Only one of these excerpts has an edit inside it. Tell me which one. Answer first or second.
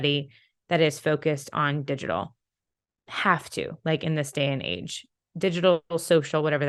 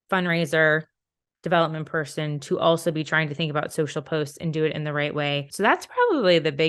second